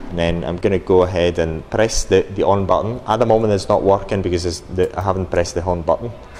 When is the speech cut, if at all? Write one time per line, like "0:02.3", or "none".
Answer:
none